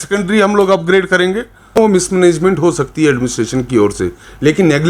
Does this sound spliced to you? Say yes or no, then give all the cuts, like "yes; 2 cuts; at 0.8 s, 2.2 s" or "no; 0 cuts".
yes; 1 cut; at 1.8 s